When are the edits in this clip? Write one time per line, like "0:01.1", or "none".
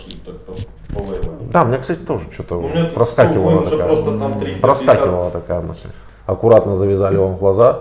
0:06.0